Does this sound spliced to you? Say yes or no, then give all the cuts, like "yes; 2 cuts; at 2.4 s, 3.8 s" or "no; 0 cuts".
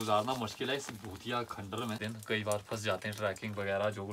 yes; 1 cut; at 2.0 s